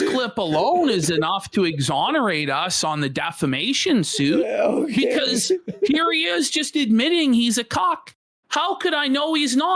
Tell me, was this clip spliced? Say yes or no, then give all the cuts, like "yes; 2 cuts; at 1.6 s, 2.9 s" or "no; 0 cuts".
no; 0 cuts